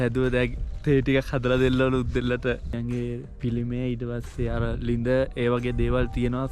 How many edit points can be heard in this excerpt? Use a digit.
1